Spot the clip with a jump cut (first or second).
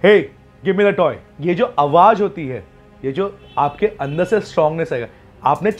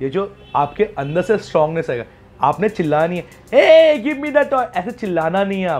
first